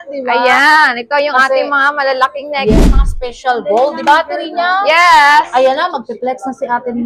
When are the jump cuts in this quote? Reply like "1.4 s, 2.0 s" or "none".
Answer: 2.7 s